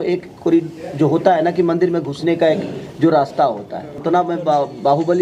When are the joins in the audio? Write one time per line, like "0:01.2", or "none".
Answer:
0:04.0